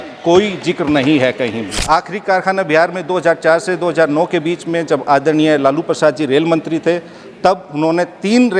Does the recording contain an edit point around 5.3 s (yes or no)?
no